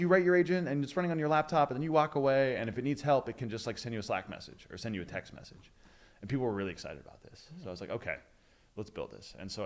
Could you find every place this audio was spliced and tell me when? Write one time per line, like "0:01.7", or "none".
none